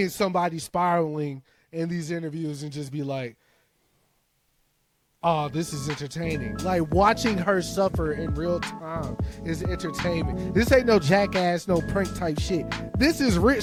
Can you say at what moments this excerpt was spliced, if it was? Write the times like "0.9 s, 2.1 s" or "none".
none